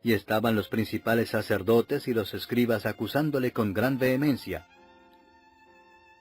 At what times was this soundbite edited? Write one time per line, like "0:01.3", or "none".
0:04.5